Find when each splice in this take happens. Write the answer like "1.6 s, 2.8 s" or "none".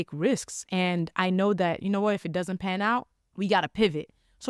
3.2 s